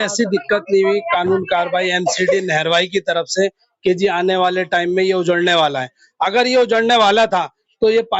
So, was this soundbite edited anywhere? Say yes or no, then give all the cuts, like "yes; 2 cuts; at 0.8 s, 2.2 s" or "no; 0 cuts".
no; 0 cuts